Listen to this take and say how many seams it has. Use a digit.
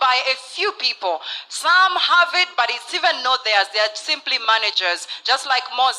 0